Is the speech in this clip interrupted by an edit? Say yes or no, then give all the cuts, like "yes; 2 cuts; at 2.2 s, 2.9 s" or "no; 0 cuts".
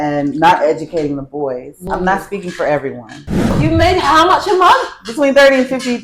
yes; 2 cuts; at 1.7 s, 3.6 s